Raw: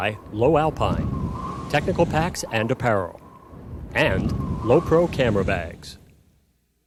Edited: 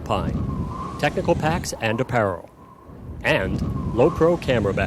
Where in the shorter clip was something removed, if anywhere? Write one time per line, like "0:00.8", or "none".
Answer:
none